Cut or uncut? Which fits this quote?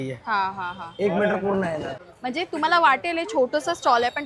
cut